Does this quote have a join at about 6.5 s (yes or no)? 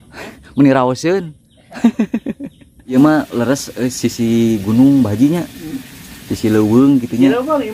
no